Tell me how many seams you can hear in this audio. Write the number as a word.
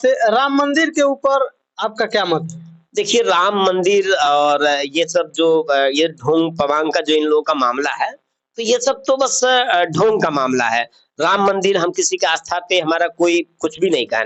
zero